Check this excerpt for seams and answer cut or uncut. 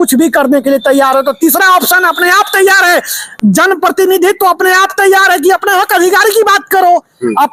uncut